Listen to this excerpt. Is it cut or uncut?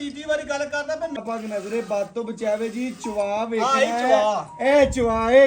cut